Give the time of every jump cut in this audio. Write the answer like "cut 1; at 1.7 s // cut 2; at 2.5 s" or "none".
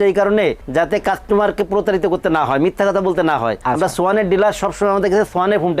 cut 1; at 3.6 s